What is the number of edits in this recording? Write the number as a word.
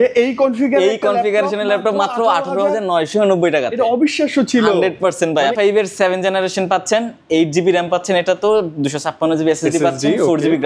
one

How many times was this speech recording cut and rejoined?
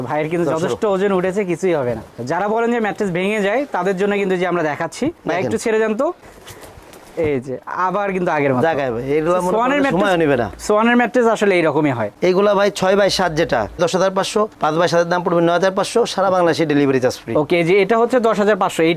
zero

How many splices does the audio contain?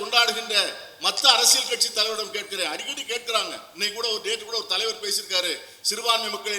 zero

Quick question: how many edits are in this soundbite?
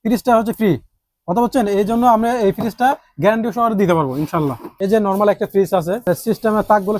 two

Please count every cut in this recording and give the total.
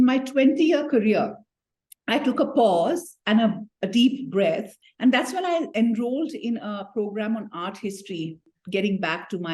one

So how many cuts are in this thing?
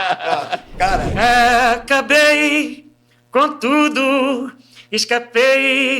one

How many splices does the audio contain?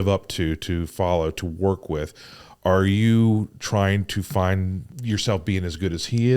one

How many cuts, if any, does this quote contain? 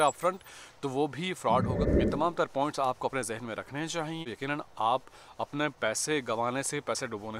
two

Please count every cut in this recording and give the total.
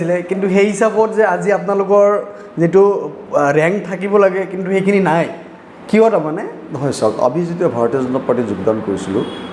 zero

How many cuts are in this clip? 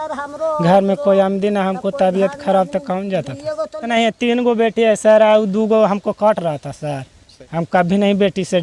two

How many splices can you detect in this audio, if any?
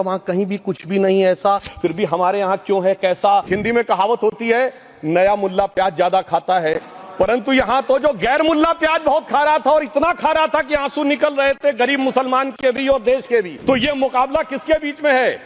two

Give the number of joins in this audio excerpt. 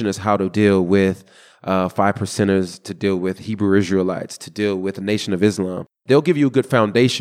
zero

